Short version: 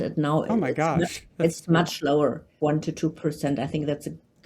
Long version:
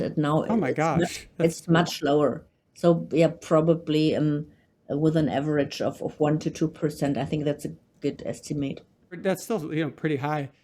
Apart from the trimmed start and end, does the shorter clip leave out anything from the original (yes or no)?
yes